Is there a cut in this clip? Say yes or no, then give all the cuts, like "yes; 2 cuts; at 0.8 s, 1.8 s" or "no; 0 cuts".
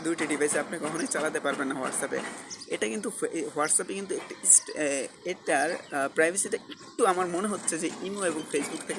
yes; 1 cut; at 5.8 s